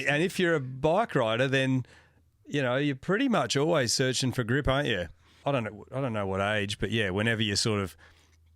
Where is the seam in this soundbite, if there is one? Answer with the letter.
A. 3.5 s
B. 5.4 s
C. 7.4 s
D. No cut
B